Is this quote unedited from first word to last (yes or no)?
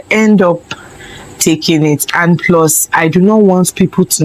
yes